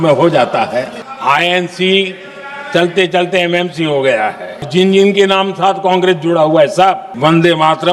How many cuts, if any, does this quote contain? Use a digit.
3